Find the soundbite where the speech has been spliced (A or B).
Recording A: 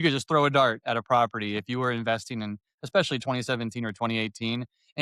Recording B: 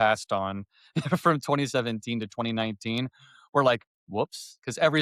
B